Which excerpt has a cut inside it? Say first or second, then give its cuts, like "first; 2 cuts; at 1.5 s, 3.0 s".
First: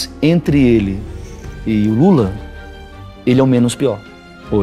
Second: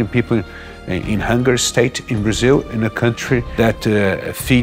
second; 1 cut; at 3.5 s